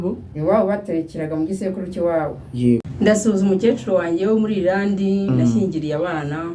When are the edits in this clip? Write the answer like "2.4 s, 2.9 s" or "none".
2.9 s